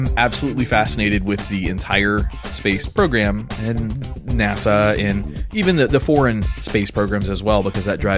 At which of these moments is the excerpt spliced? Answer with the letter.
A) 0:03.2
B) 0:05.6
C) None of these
A